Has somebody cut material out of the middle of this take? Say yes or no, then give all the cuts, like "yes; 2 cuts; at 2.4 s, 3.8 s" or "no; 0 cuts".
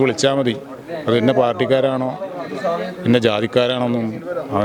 no; 0 cuts